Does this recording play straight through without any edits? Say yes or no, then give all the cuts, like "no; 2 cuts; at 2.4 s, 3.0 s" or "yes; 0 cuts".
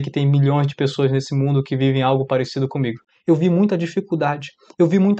no; 1 cut; at 3.1 s